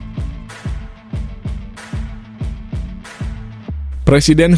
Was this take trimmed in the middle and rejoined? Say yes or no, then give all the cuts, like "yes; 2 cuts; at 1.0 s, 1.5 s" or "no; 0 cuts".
no; 0 cuts